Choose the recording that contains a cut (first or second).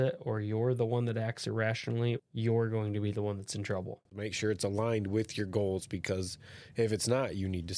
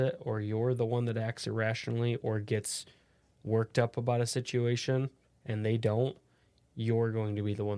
first